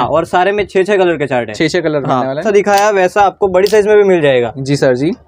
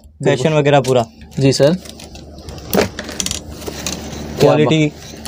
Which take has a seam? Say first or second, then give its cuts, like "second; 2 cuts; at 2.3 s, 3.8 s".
first; 1 cut; at 2.4 s